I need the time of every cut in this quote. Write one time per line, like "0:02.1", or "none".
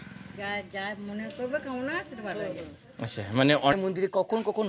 0:03.7